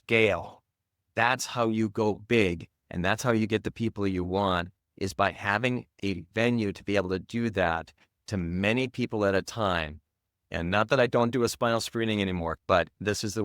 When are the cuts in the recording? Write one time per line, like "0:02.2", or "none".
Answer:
0:12.6

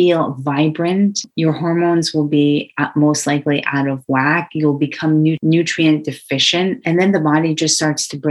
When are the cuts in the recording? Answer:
0:01.3
0:05.4
0:06.8

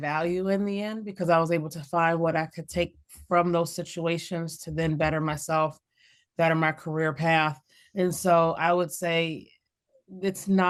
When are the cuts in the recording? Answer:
none

